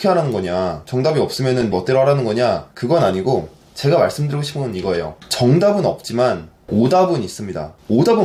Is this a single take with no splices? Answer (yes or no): yes